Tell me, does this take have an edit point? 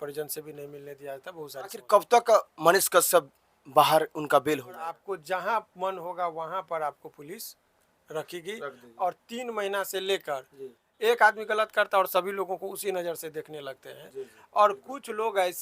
yes; 3 cuts; at 1.8 s, 5.0 s, 10.8 s

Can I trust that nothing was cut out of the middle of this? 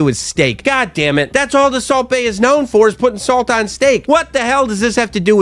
yes; 0 cuts

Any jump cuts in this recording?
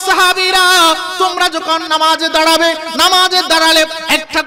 no; 0 cuts

